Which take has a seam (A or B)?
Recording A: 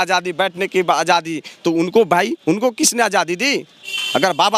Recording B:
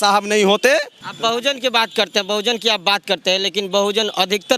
B